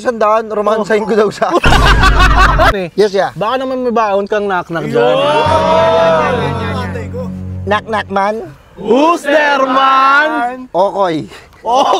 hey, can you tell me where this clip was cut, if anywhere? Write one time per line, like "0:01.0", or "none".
0:02.8